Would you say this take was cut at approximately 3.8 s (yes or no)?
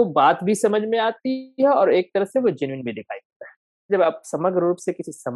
yes